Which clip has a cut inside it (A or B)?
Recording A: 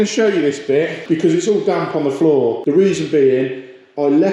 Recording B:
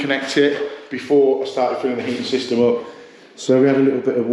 A